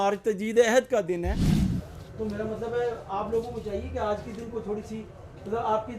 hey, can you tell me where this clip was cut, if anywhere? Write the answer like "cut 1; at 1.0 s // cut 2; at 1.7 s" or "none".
cut 1; at 1.6 s